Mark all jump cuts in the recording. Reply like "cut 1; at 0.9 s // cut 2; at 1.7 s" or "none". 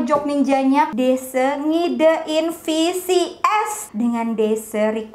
cut 1; at 0.9 s // cut 2; at 3.8 s